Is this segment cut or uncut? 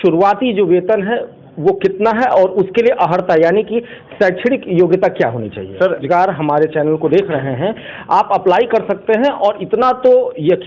cut